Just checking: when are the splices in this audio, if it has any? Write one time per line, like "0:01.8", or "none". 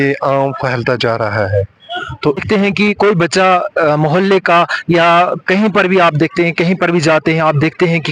0:02.4